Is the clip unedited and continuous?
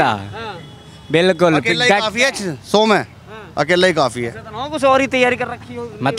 yes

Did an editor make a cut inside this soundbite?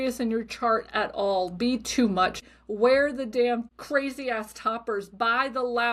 yes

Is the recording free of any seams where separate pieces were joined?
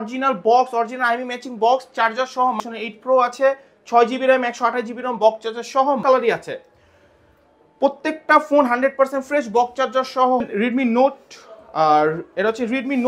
no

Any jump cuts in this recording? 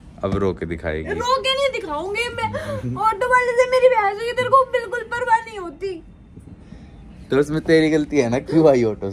no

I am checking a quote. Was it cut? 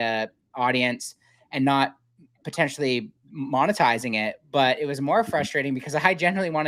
no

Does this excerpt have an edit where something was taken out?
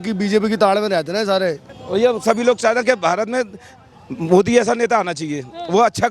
yes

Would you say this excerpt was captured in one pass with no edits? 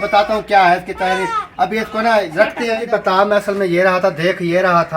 no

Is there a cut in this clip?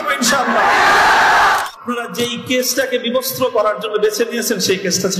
yes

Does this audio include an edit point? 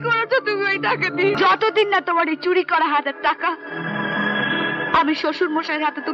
yes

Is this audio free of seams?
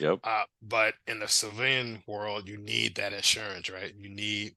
yes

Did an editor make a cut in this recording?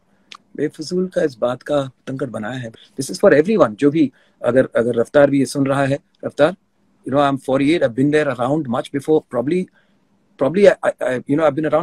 yes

